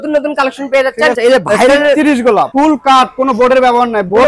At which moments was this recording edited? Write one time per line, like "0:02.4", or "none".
0:01.2
0:02.5